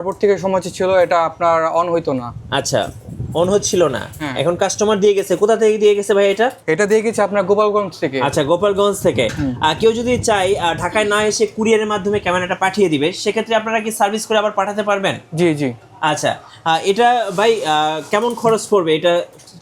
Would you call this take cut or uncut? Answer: uncut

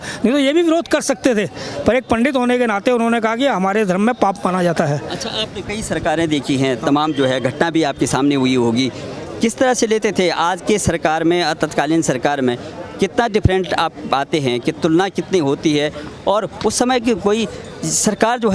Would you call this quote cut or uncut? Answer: uncut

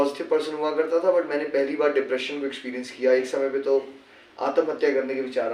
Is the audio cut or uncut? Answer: uncut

